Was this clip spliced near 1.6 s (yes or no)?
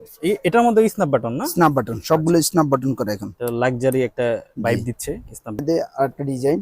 no